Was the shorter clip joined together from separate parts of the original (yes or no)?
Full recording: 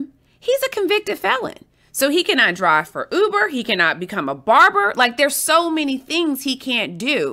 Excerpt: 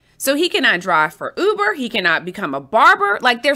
no